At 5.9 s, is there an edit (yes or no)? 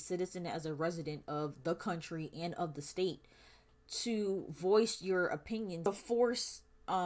yes